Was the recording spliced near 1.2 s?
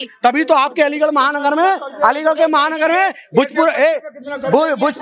no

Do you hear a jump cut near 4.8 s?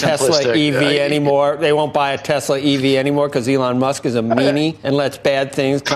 yes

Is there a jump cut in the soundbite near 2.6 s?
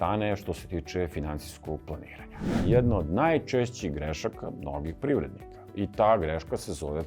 yes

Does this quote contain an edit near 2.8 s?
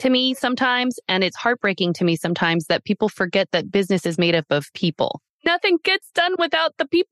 no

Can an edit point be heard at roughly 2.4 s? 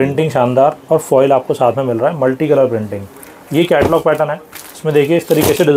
no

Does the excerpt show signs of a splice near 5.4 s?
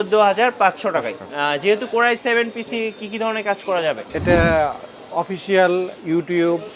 no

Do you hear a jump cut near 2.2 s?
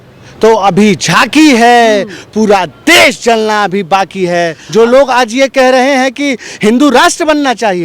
no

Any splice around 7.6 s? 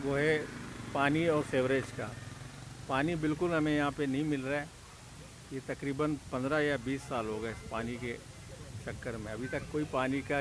no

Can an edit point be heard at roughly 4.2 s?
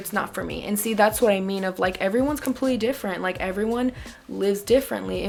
no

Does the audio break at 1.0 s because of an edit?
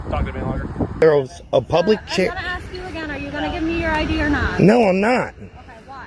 yes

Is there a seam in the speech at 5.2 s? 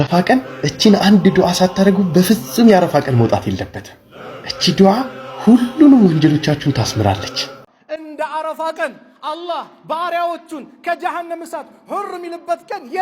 no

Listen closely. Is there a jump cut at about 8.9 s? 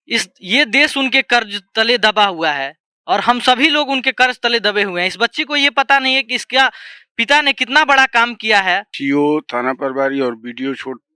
yes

